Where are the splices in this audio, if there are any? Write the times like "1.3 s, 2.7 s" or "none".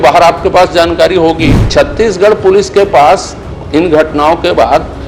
1.6 s